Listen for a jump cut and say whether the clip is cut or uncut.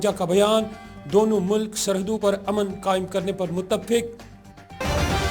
cut